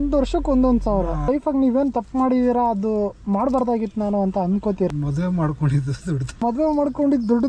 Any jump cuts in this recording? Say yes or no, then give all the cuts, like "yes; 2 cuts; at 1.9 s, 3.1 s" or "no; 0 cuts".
yes; 3 cuts; at 1.3 s, 4.9 s, 6.4 s